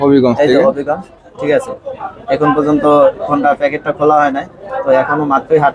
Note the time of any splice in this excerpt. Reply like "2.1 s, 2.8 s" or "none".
none